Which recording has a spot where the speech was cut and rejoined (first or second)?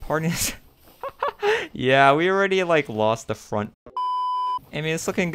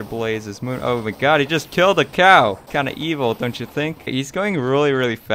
second